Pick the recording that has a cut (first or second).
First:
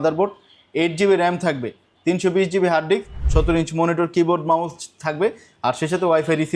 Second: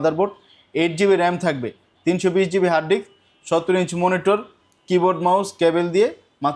first